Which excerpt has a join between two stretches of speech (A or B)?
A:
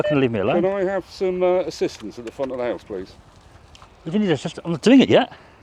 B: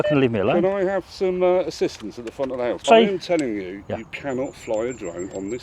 B